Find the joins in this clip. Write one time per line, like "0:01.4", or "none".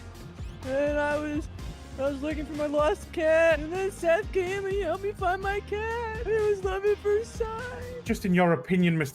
0:08.0